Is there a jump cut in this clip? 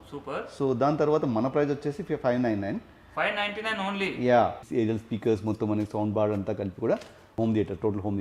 yes; 2 cuts; at 4.7 s, 7.2 s

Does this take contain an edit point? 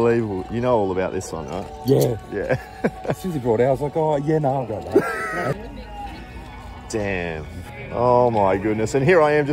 yes; 2 cuts; at 5.5 s, 7.7 s

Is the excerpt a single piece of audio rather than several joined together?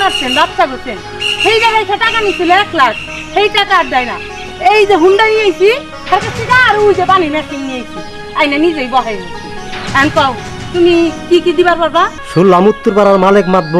no; 1 cut; at 12.2 s

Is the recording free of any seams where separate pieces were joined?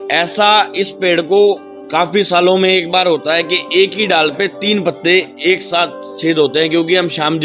yes; 0 cuts

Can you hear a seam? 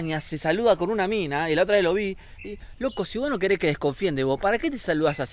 no; 0 cuts

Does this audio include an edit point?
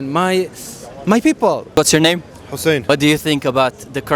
no; 0 cuts

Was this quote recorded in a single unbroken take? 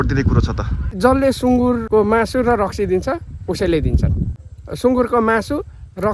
no; 3 cuts; at 1.0 s, 1.8 s, 4.7 s

